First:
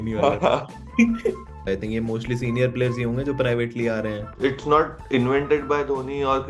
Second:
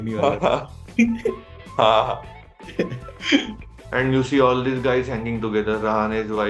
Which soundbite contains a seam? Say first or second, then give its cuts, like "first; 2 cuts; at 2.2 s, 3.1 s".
first; 2 cuts; at 1.7 s, 4.3 s